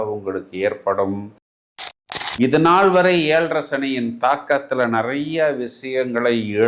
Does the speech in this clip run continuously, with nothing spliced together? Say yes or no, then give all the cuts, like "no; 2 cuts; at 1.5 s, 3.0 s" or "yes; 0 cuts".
no; 1 cut; at 1.7 s